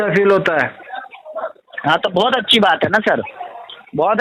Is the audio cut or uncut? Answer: uncut